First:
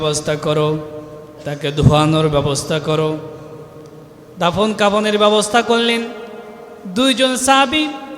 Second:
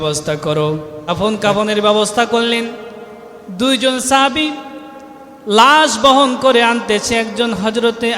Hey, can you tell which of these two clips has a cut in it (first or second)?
second